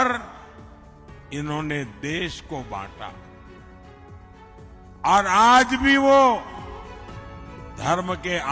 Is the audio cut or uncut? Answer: cut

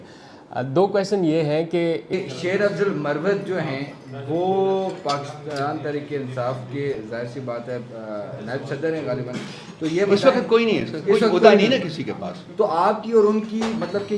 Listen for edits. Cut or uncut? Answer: cut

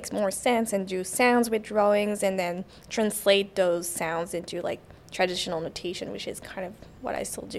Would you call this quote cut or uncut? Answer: uncut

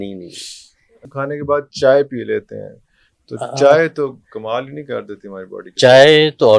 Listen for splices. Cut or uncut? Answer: cut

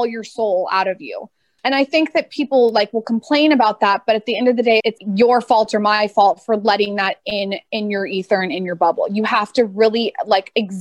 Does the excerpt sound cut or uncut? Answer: uncut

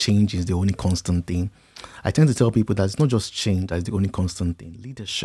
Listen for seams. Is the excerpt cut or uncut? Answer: uncut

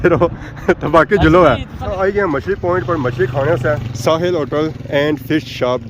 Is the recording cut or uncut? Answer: cut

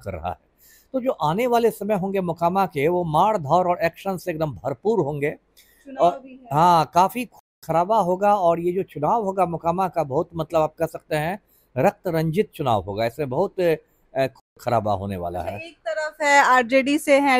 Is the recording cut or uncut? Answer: uncut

